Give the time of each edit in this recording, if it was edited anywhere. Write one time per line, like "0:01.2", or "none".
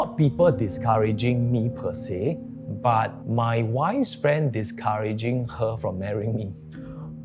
none